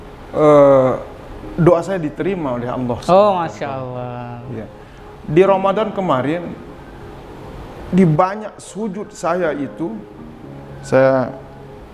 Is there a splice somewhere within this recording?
no; 0 cuts

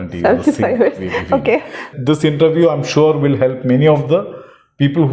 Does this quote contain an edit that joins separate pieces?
yes; 1 cut; at 1.8 s

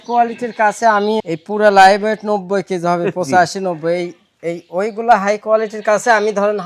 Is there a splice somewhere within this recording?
yes; 1 cut; at 1.2 s

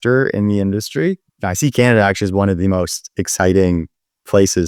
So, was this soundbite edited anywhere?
no; 0 cuts

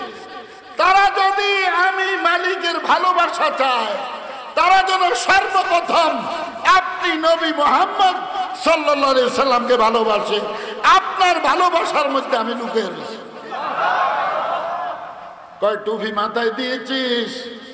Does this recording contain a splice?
no; 0 cuts

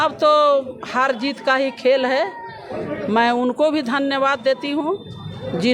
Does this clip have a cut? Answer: no; 0 cuts

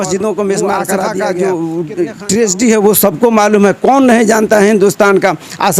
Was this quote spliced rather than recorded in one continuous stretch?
yes; 1 cut; at 1.1 s

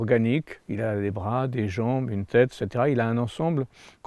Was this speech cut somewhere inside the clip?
no; 0 cuts

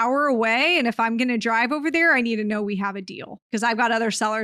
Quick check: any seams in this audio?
yes; 1 cut; at 3.5 s

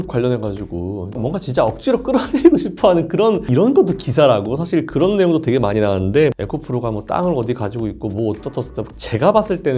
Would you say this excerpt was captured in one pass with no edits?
no; 4 cuts; at 1.2 s, 3.5 s, 6.3 s, 8.9 s

